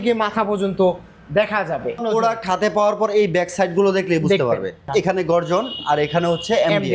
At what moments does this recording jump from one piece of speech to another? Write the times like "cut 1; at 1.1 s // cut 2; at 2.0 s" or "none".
cut 1; at 2.0 s // cut 2; at 4.8 s